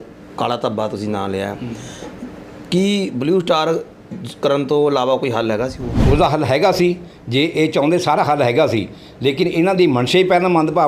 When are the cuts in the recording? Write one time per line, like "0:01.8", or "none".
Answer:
0:05.9